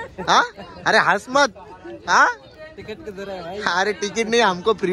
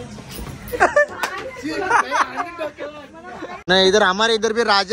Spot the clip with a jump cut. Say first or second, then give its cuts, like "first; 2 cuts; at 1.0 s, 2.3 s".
second; 1 cut; at 3.6 s